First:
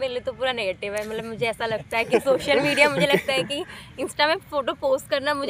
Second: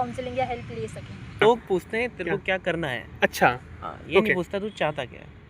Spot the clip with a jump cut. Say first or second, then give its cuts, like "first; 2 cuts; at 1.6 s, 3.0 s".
second; 1 cut; at 1.4 s